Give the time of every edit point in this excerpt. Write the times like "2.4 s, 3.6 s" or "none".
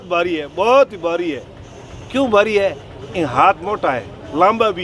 none